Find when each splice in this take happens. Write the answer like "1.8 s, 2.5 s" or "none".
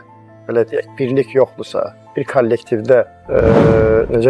3.2 s